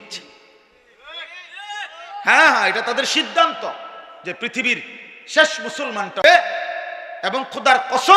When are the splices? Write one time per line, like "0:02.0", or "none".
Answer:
0:06.2